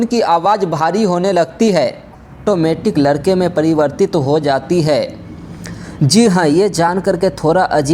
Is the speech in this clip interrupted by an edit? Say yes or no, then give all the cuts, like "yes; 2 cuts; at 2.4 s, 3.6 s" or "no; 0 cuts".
yes; 1 cut; at 2.4 s